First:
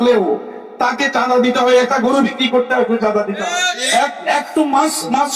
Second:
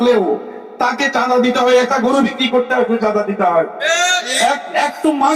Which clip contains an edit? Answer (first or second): first